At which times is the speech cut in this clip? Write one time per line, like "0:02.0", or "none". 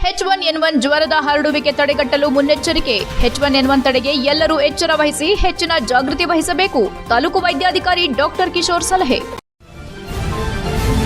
0:09.4